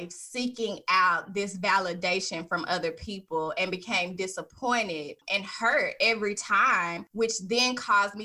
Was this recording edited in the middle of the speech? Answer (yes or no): yes